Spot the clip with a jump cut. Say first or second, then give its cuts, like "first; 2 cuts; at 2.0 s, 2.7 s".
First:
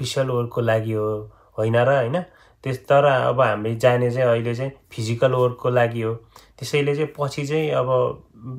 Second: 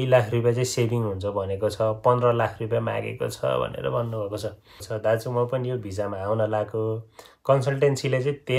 second; 1 cut; at 4.8 s